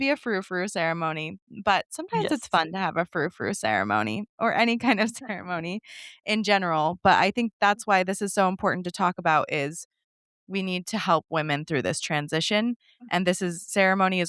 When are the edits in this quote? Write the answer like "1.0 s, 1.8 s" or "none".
none